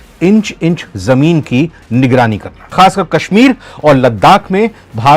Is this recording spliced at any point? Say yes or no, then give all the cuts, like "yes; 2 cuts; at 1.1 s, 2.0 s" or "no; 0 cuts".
yes; 1 cut; at 2.7 s